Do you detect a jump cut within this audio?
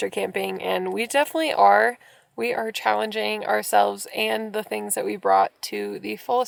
no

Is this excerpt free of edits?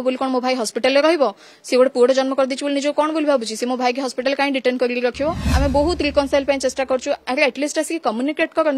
no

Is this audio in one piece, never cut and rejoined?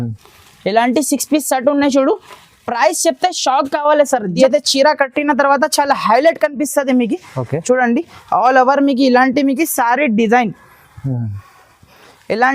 no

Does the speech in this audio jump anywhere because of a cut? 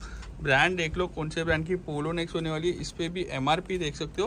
no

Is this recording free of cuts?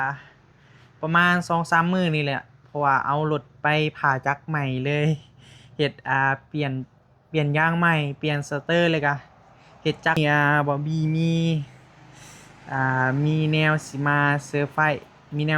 no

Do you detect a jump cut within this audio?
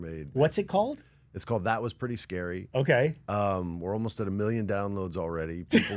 no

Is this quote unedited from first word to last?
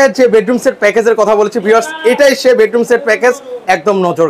yes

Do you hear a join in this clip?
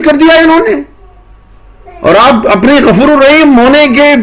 no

